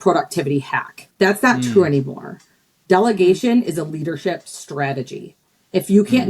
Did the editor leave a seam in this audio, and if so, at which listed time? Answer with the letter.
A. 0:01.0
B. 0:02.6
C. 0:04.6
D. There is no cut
A